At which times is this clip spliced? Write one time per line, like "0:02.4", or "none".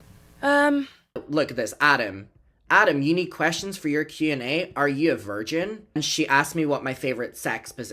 0:01.3
0:05.9